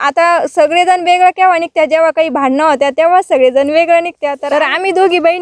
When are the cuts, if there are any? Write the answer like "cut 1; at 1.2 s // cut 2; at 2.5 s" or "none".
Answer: cut 1; at 4.3 s